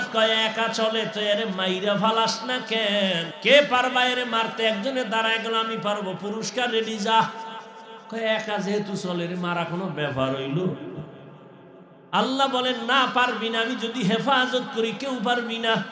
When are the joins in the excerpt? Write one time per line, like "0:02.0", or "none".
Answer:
0:03.3